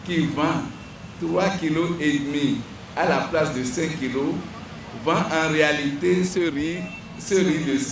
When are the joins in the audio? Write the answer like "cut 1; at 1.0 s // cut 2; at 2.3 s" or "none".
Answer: none